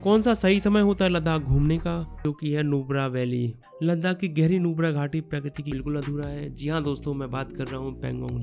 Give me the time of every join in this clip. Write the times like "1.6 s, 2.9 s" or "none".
2.2 s, 5.7 s